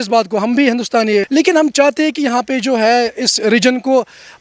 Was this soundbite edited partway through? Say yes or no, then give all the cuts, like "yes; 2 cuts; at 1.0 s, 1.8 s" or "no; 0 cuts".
yes; 1 cut; at 1.3 s